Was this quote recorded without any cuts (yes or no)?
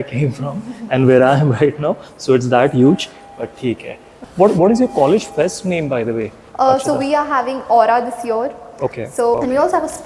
no